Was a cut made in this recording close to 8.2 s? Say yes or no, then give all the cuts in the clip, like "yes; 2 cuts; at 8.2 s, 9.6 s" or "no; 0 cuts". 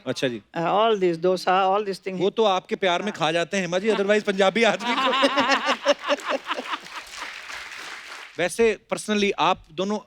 yes; 1 cut; at 8.2 s